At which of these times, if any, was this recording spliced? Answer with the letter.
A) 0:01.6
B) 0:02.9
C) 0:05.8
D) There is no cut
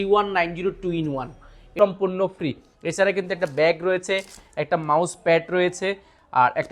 A